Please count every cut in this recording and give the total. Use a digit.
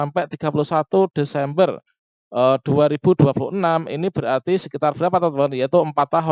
0